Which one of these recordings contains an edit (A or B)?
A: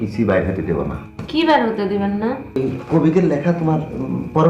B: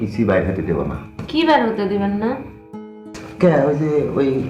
A